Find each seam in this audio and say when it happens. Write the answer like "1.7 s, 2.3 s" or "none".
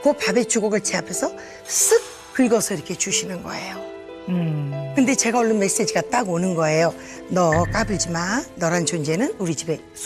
none